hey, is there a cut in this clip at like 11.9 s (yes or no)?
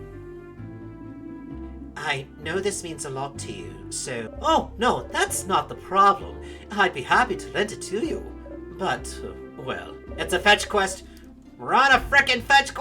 no